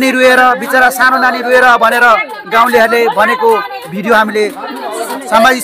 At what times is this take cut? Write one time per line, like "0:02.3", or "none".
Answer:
0:04.7